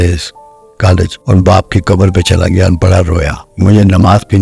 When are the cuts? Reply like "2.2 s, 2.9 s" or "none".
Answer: 1.2 s, 3.4 s